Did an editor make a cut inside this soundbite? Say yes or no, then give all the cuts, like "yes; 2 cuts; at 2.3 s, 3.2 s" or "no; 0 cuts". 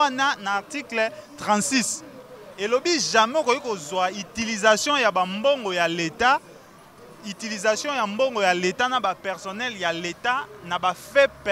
no; 0 cuts